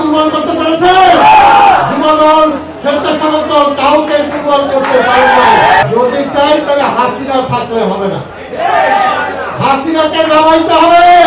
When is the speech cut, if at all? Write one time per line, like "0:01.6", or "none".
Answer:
0:05.8